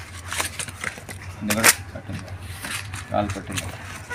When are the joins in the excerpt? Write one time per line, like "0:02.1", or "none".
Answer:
none